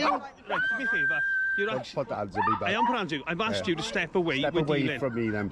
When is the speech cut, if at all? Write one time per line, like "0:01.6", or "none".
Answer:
0:01.0